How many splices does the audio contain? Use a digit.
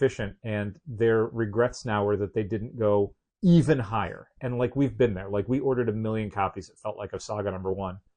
1